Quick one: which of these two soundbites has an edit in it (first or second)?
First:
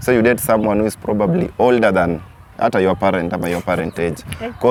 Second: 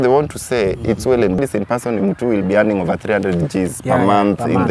second